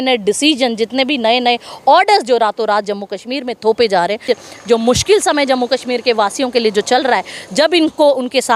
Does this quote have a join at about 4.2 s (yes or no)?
yes